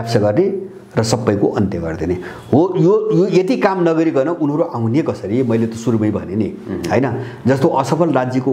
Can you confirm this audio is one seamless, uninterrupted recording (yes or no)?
yes